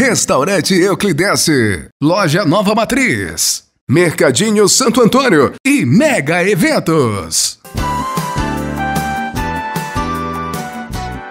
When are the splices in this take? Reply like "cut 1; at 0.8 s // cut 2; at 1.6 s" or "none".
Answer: none